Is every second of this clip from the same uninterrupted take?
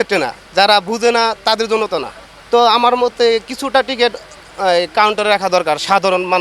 yes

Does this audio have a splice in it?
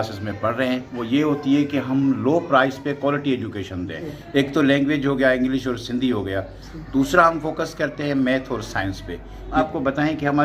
yes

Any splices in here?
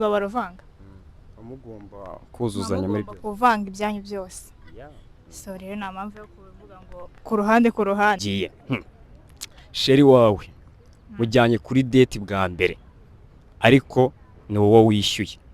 yes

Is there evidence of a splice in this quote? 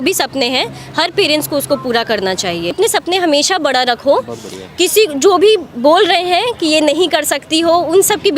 yes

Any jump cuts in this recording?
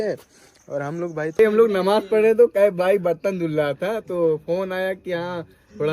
yes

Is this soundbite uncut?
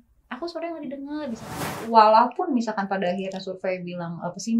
no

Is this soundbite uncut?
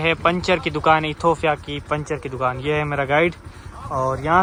yes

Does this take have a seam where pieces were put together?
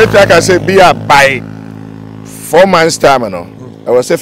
no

